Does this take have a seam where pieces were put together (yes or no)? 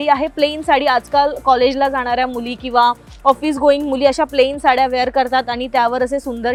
no